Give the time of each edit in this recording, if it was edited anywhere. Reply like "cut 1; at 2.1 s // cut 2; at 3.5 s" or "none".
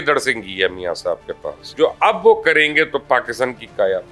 cut 1; at 1.6 s